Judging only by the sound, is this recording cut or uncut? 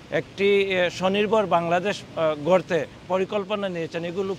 cut